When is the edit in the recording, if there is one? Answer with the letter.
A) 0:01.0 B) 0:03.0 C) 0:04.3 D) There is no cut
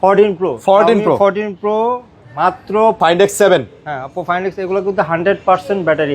B